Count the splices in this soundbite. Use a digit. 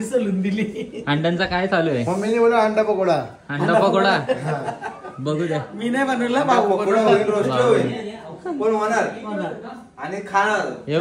0